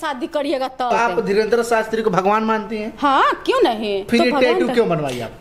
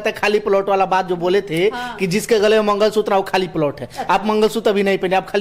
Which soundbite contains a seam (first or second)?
first